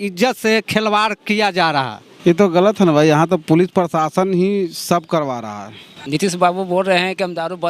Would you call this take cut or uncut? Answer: cut